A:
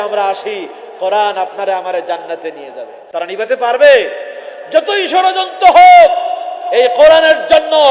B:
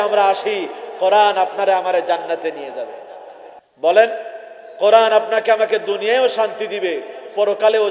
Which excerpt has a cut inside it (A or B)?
A